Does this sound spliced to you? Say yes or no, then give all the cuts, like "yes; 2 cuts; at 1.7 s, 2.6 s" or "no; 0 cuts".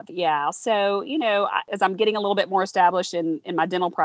yes; 1 cut; at 1.6 s